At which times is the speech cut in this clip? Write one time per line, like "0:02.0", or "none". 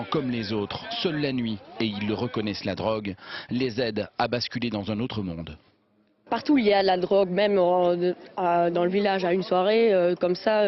none